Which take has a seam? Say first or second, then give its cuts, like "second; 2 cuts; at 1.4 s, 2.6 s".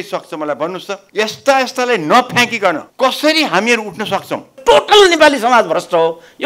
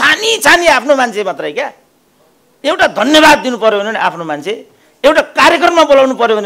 first; 3 cuts; at 1.0 s, 2.9 s, 4.6 s